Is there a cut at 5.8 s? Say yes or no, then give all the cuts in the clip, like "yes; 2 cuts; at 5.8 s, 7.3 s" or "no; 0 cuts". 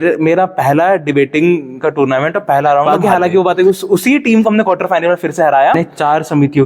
yes; 2 cuts; at 2.8 s, 5.8 s